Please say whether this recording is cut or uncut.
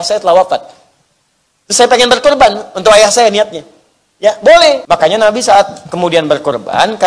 cut